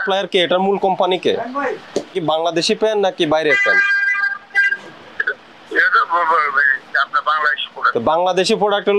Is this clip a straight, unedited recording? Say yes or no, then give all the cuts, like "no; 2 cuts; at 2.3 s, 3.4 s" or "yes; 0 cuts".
no; 1 cut; at 2.1 s